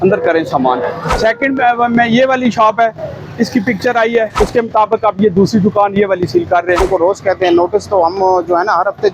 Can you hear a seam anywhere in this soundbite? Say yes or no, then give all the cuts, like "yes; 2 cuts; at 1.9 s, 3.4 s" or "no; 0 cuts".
yes; 3 cuts; at 1.1 s, 4.3 s, 6.8 s